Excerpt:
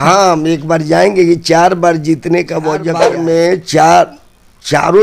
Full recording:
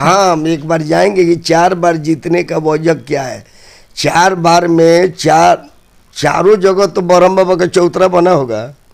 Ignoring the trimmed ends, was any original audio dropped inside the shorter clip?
yes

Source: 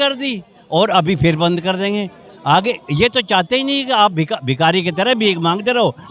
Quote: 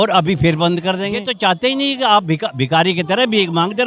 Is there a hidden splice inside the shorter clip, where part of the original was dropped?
yes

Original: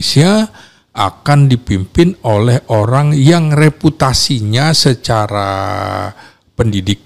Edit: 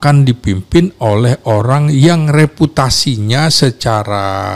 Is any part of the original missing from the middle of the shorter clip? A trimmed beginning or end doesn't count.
no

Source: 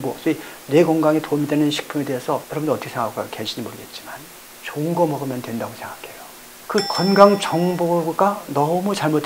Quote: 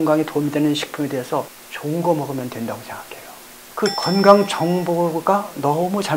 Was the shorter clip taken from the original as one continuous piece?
no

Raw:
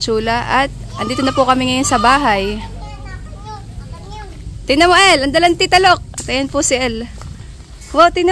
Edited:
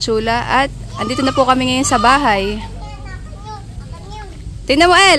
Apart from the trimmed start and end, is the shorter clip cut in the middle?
no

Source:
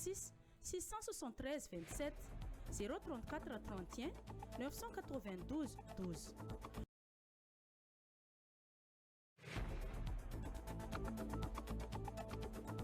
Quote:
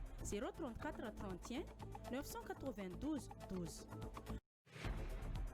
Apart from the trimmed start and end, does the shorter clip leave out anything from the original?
yes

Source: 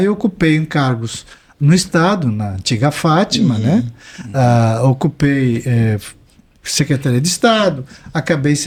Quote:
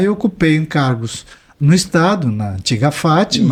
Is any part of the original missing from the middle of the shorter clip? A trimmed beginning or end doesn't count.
no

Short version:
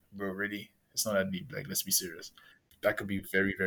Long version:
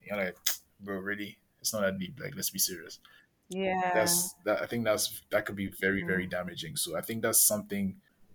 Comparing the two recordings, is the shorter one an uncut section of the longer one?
no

